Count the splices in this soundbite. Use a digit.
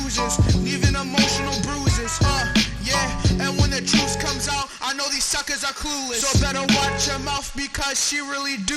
1